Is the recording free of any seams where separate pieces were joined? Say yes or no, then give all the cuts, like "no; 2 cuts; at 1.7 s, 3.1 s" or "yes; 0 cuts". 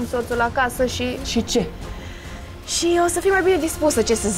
no; 1 cut; at 1.2 s